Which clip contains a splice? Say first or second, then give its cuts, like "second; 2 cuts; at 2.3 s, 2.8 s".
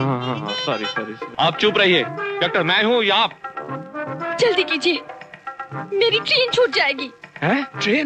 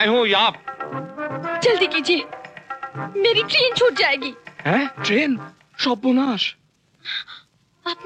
first; 1 cut; at 1.2 s